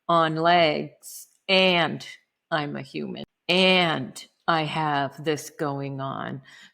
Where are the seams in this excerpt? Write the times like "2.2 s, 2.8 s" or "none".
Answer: 3.3 s